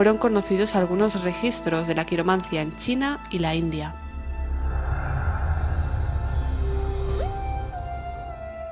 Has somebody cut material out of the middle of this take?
yes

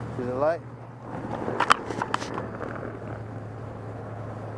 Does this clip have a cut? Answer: no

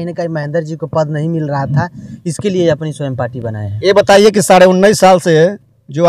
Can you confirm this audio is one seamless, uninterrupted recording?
yes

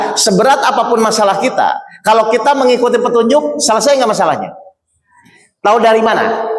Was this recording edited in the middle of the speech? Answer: no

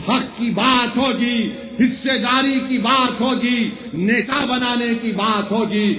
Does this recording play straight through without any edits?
yes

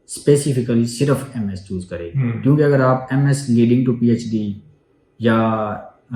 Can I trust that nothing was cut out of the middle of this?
yes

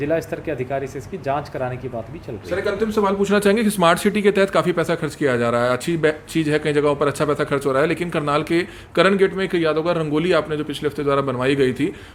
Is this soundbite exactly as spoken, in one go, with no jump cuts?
yes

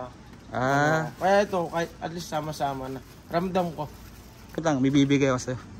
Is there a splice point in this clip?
yes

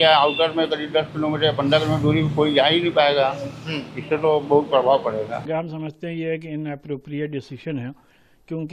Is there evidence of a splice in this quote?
yes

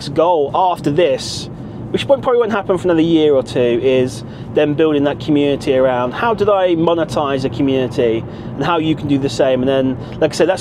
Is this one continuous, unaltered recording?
yes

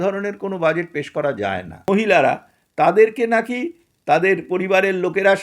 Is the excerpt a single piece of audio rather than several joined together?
no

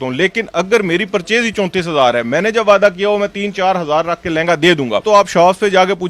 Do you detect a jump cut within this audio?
yes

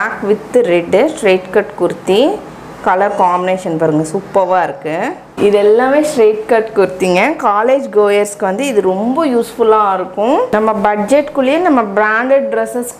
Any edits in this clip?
no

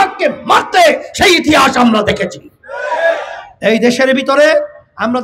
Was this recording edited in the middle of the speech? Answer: no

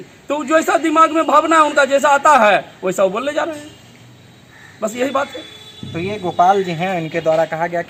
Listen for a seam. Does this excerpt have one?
no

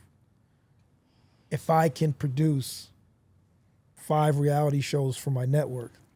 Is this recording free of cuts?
yes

